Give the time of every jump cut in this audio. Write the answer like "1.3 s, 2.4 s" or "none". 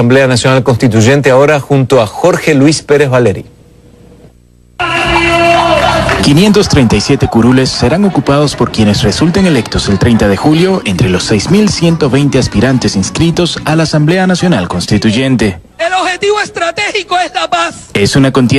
3.4 s